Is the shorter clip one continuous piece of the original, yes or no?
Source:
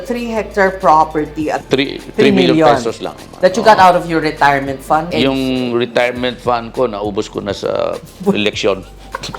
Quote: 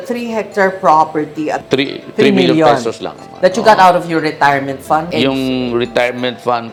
yes